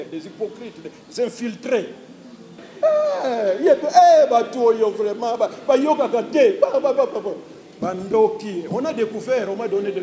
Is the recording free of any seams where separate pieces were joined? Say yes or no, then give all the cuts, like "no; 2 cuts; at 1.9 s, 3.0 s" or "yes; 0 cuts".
no; 1 cut; at 2.7 s